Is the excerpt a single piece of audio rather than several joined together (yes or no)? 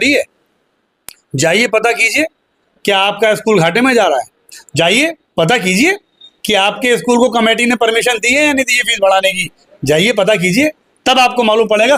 yes